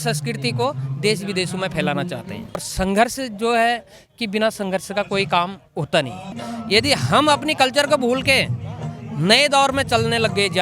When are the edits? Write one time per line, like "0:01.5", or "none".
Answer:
0:02.7
0:06.5